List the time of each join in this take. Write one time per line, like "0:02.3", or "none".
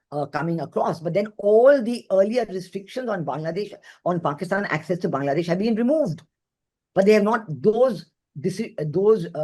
none